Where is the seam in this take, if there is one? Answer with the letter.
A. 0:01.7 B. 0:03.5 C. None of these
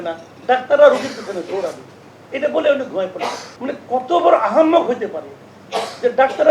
B